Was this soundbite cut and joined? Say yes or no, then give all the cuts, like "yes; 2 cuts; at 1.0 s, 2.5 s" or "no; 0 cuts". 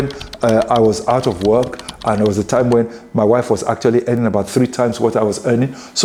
no; 0 cuts